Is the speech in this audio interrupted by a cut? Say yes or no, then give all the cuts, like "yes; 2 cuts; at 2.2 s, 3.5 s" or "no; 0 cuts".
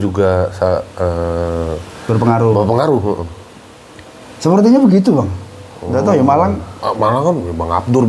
no; 0 cuts